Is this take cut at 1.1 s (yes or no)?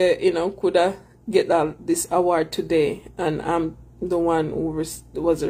no